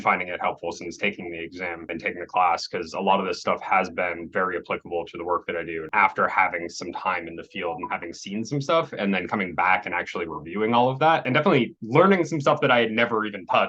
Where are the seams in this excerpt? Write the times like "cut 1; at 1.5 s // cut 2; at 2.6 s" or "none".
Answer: cut 1; at 1.9 s // cut 2; at 5.9 s // cut 3; at 11.3 s